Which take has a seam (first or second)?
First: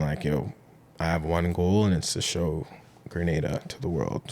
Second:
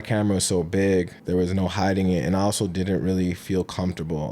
second